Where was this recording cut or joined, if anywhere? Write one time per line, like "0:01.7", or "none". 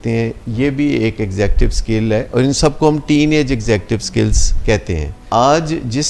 0:05.1